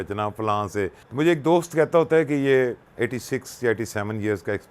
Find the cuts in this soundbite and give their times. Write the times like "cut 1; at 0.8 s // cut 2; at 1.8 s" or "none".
cut 1; at 1.0 s // cut 2; at 2.9 s